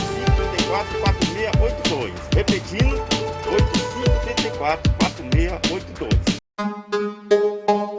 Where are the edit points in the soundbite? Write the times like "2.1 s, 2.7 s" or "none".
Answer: none